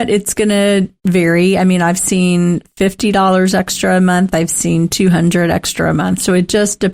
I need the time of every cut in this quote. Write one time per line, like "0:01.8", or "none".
0:00.9